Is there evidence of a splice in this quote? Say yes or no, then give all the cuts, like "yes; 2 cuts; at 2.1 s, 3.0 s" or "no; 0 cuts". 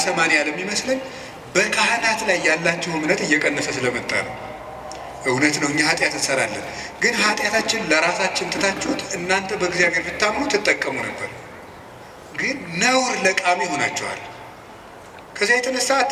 no; 0 cuts